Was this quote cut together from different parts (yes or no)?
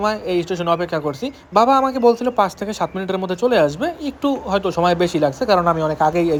no